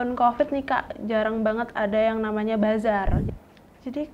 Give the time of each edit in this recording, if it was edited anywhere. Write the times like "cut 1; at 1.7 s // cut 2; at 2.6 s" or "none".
cut 1; at 3.2 s